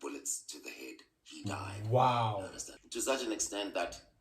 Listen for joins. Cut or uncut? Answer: cut